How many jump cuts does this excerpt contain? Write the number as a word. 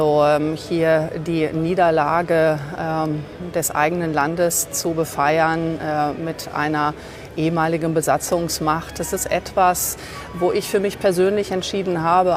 zero